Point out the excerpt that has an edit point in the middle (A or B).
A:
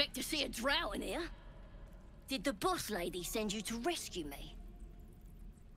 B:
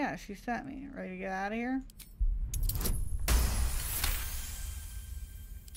B